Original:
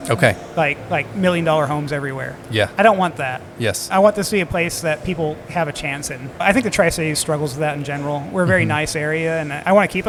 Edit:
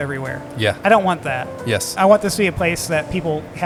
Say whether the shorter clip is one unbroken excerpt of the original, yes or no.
yes